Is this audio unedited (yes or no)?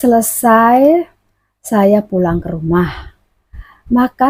yes